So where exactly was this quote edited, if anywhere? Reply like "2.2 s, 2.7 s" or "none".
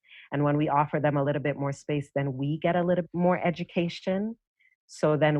3.0 s